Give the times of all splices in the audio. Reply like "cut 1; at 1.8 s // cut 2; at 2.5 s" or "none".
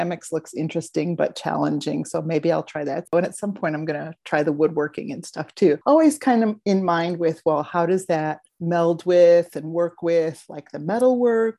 cut 1; at 3.1 s // cut 2; at 5.8 s // cut 3; at 8.5 s